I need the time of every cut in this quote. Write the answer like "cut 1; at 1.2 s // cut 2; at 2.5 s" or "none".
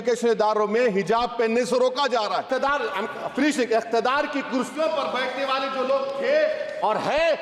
cut 1; at 2.4 s